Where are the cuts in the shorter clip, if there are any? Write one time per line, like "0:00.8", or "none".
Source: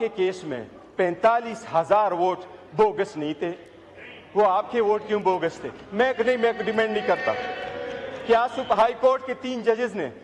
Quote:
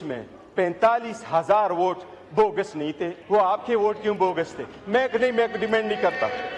0:03.1